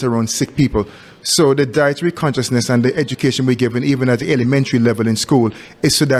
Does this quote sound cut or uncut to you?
uncut